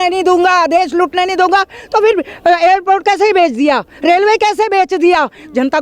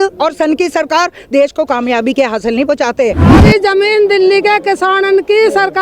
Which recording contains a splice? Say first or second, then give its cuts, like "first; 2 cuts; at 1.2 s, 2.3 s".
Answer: second; 1 cut; at 3.4 s